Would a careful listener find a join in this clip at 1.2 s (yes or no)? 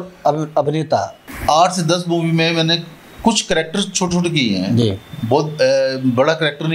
yes